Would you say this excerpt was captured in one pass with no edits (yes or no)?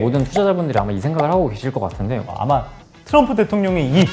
no